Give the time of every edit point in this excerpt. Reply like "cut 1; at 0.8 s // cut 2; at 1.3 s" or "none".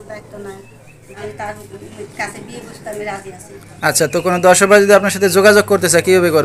cut 1; at 1.1 s